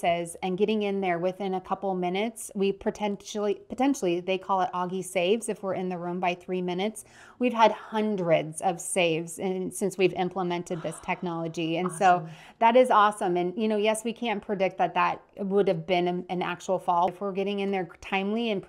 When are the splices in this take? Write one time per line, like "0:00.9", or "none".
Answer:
0:17.1